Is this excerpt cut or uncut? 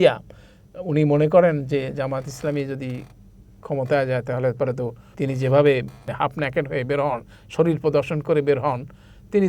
cut